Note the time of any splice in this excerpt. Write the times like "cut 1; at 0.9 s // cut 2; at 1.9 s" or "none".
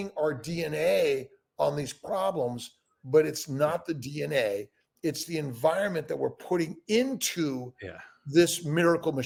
none

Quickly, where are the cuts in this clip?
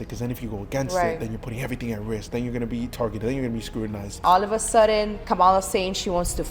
cut 1; at 4.2 s // cut 2; at 5.2 s

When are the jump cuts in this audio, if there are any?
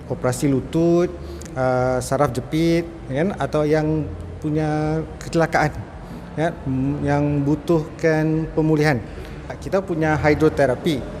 cut 1; at 9.5 s

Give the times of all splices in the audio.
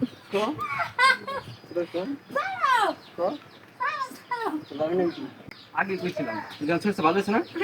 cut 1; at 5.6 s

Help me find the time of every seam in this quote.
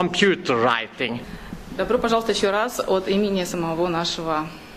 none

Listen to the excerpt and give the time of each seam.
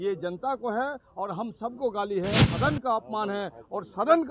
cut 1; at 2.5 s

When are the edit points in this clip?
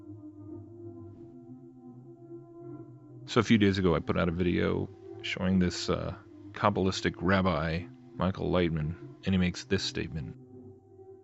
cut 1; at 3.1 s

